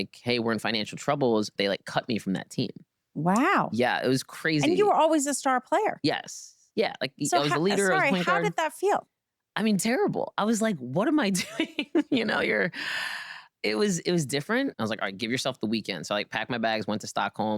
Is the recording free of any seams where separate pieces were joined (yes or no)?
no